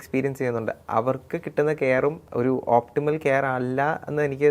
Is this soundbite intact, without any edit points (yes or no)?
no